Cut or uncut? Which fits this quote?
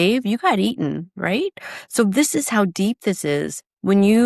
uncut